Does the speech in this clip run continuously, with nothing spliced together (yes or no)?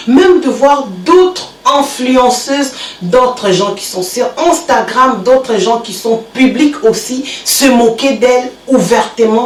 yes